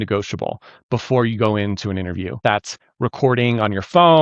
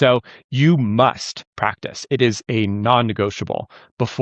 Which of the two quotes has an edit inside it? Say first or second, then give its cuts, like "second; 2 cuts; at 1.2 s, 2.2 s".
first; 1 cut; at 2.4 s